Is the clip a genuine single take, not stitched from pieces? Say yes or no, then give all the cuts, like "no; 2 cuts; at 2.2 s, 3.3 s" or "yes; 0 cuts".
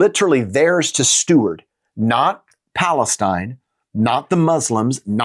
yes; 0 cuts